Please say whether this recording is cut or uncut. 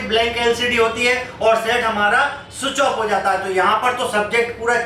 uncut